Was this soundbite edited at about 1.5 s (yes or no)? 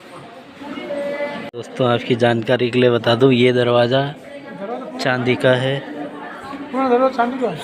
yes